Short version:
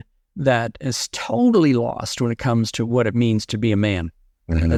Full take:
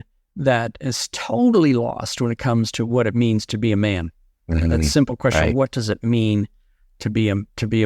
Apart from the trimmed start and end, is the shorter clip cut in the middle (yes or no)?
no